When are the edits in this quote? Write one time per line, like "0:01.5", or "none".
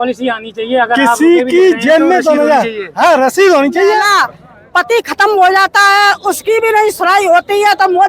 0:04.1

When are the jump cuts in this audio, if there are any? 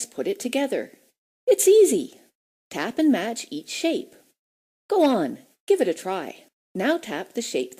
none

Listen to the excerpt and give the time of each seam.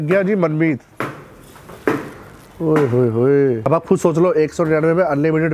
0:03.7

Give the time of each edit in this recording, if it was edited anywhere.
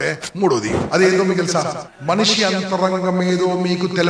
0:01.8

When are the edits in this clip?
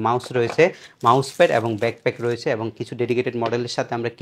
none

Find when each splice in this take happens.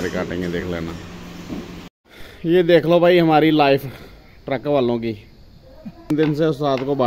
0:02.0
0:06.1

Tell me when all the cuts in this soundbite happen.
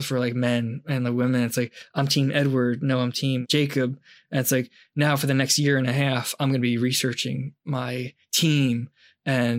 0:03.4

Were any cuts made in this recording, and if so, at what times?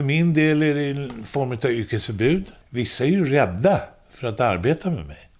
0:02.6

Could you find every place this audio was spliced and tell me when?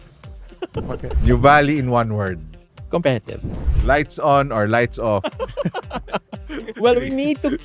0:01.2

